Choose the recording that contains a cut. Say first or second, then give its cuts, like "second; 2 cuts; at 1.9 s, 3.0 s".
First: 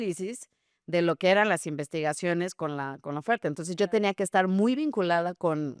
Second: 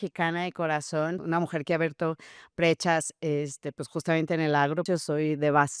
second; 2 cuts; at 1.2 s, 4.8 s